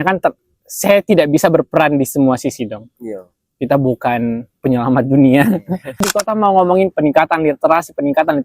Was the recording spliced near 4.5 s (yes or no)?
no